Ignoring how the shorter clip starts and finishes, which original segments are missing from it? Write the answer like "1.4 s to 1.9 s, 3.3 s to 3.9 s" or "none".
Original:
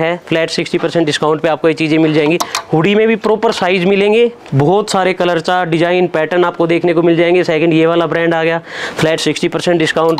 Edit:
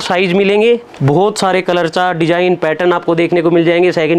none